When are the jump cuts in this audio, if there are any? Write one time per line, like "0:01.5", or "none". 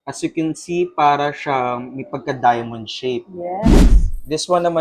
0:03.8